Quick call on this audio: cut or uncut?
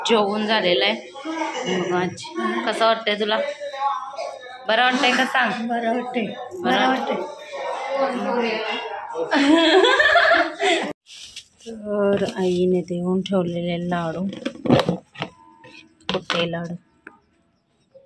cut